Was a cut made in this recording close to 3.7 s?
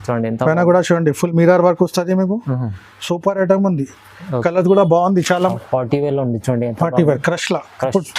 no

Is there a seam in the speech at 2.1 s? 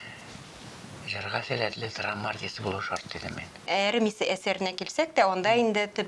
no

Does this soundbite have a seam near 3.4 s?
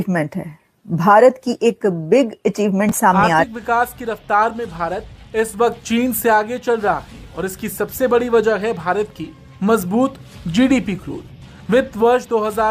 yes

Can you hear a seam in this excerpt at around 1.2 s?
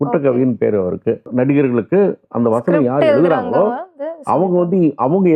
yes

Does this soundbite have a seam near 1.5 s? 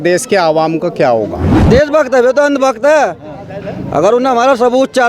yes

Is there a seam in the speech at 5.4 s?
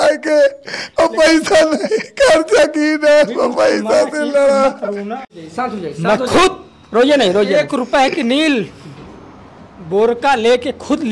yes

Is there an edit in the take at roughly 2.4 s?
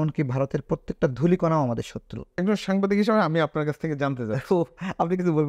yes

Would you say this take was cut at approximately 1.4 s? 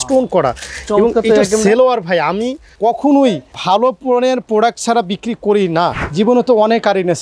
no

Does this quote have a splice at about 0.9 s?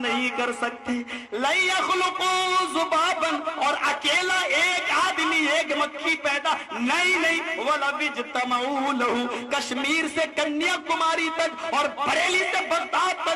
no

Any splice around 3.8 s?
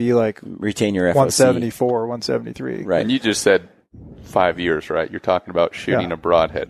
no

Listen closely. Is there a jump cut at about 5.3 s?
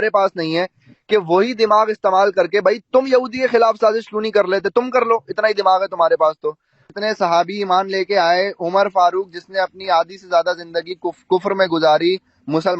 no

